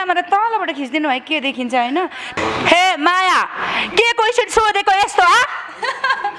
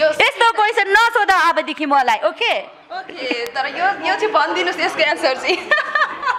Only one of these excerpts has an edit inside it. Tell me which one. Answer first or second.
first